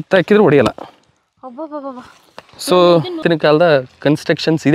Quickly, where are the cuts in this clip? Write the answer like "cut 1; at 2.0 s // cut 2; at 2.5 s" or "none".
cut 1; at 3.2 s